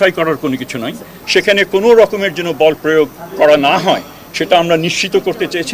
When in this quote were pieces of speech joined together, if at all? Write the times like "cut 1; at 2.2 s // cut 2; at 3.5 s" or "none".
cut 1; at 1.2 s